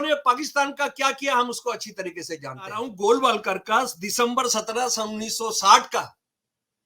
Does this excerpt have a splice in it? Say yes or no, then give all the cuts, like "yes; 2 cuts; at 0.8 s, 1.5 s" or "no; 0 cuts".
yes; 1 cut; at 2.9 s